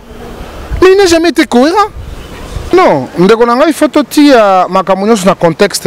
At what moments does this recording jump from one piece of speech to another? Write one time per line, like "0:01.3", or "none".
0:02.7